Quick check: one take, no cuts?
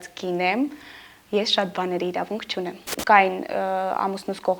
no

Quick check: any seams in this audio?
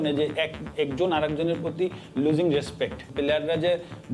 yes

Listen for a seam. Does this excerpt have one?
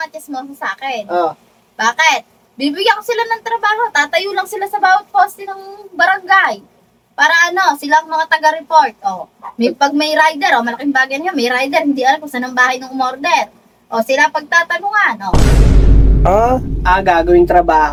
no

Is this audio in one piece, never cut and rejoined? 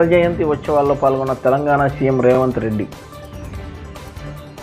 yes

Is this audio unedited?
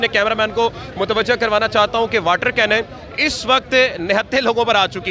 yes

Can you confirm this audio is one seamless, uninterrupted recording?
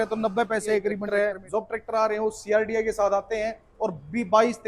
no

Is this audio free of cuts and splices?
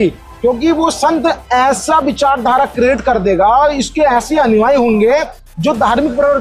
yes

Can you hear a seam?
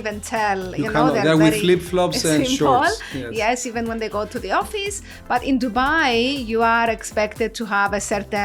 no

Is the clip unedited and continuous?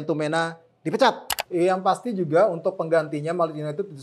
no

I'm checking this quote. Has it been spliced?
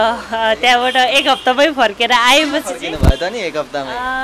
no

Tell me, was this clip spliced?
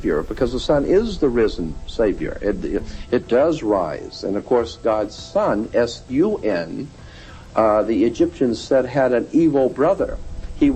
no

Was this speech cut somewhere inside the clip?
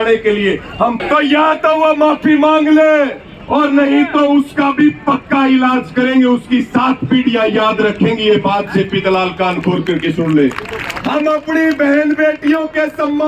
yes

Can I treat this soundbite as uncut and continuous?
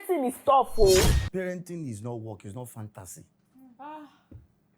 no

